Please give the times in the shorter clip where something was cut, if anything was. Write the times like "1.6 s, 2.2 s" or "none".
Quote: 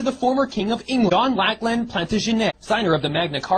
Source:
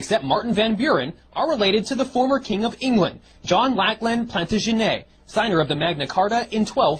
1.1 s, 2.6 s

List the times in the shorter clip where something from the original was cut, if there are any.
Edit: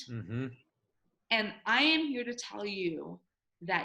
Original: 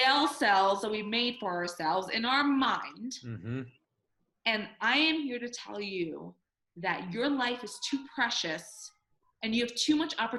none

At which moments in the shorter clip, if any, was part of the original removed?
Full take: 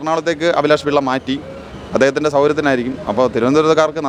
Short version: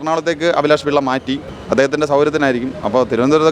1.6 s

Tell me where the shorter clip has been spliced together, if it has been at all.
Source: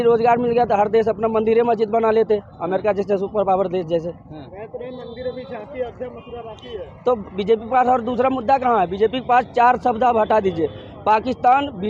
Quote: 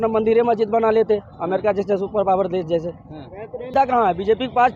3.7 s

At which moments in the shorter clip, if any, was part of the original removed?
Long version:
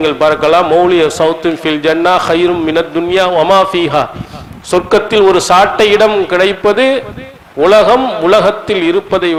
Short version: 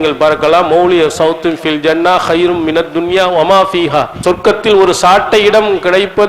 4.1 s

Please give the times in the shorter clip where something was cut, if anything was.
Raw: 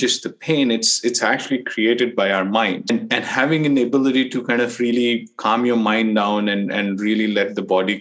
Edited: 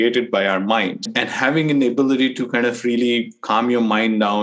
1.0 s

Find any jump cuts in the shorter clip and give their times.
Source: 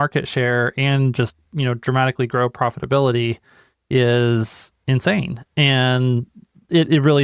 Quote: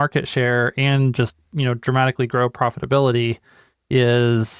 none

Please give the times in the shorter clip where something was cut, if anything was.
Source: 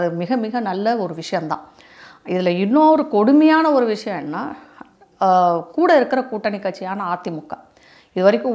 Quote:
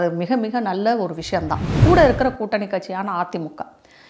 1.7 s

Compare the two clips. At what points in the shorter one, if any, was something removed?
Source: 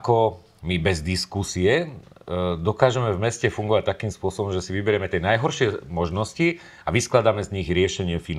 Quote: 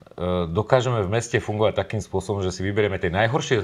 none

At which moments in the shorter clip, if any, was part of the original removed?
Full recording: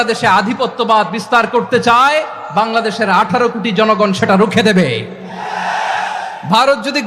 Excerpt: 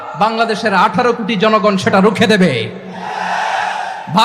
none

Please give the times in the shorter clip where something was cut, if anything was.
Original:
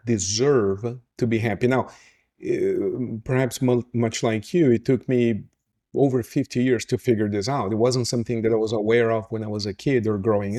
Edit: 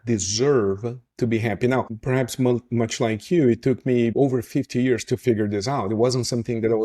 2.0 s, 4.1 s

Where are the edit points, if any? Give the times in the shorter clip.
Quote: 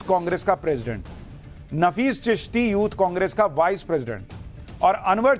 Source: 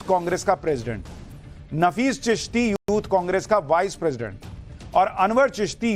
2.7 s

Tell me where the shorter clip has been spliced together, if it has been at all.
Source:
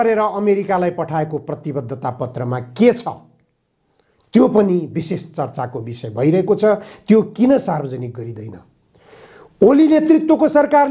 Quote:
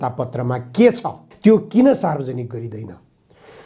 1.3 s

